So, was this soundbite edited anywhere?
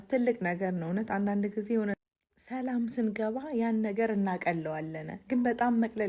no; 0 cuts

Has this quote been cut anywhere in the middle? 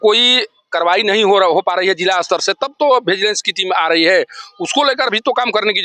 no; 0 cuts

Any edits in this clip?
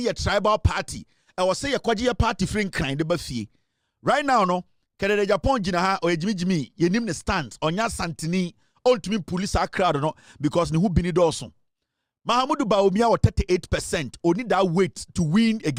no; 0 cuts

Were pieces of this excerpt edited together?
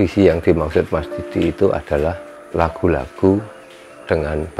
yes; 1 cut; at 2.3 s

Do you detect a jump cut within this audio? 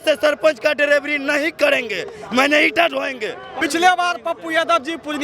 yes; 1 cut; at 3.6 s

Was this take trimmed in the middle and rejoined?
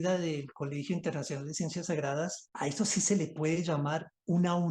yes; 1 cut; at 2.4 s

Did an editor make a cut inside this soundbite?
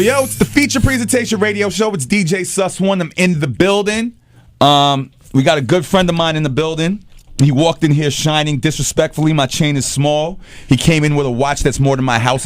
yes; 1 cut; at 4.0 s

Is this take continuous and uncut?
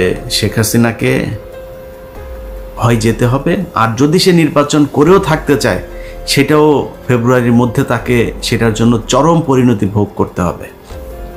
yes; 0 cuts

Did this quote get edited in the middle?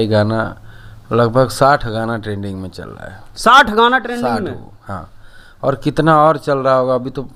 no; 0 cuts

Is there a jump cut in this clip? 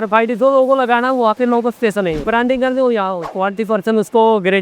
yes; 1 cut; at 3.4 s

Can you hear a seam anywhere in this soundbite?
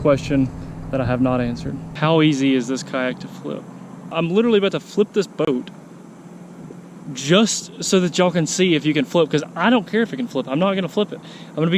yes; 2 cuts; at 1.9 s, 4.1 s

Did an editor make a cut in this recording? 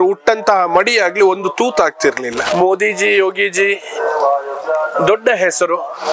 yes; 1 cut; at 2.5 s

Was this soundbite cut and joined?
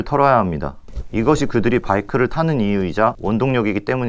yes; 1 cut; at 3.2 s

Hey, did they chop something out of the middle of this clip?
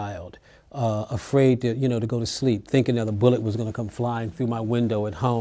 no; 0 cuts

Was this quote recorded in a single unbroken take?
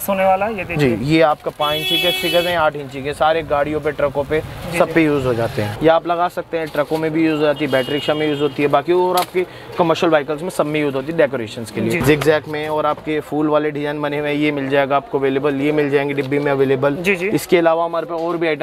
no; 2 cuts; at 5.7 s, 12.0 s

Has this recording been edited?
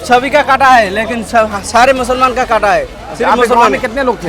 no; 0 cuts

